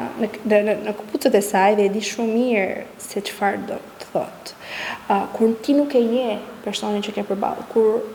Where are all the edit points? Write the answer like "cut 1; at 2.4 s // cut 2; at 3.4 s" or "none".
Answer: none